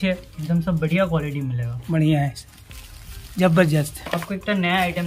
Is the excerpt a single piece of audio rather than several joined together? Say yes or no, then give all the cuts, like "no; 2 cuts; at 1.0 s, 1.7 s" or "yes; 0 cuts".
yes; 0 cuts